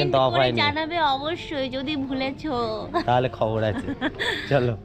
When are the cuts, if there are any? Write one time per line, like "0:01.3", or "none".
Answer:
none